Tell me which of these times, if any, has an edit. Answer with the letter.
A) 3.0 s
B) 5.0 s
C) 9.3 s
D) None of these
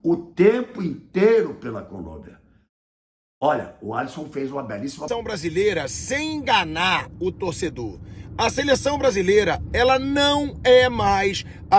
B